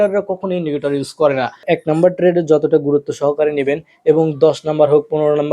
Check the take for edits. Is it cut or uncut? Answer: cut